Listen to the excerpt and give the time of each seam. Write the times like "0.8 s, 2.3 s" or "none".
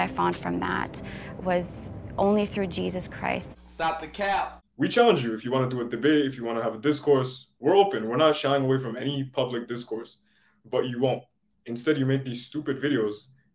4.1 s